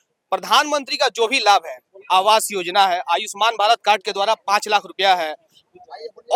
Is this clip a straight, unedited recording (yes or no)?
yes